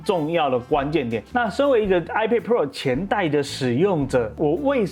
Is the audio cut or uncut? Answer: cut